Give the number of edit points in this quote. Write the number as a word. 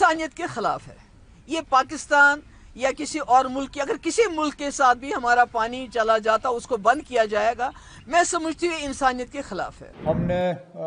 one